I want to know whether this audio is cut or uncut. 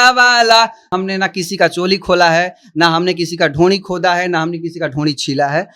cut